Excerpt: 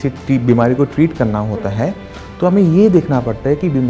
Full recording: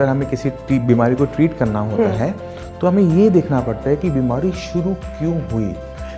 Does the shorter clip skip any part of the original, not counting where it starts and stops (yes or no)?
no